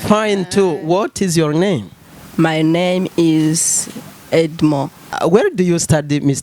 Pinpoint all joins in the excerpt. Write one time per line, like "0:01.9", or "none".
0:05.1